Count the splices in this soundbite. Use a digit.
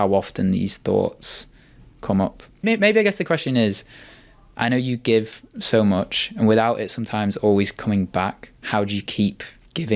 1